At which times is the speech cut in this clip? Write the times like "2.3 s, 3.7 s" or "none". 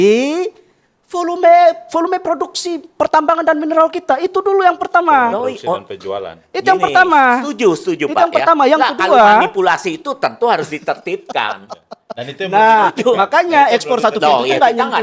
none